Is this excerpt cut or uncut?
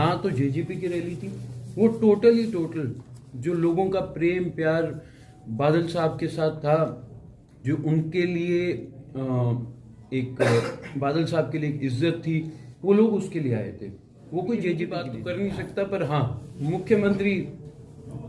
cut